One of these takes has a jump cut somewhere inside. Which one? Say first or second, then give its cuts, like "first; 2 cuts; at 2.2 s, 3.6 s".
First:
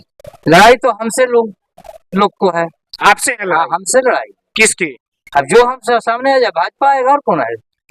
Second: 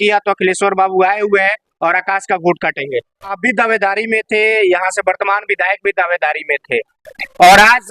second; 1 cut; at 3.4 s